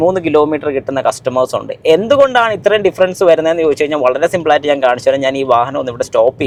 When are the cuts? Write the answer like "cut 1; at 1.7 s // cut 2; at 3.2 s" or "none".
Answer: none